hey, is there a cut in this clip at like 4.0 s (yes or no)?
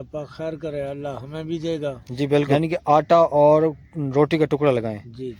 no